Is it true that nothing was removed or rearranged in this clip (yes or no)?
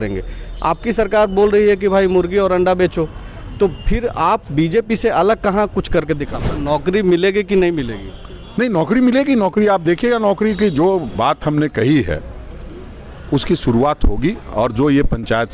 no